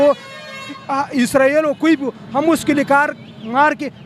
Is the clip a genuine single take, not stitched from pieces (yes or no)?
yes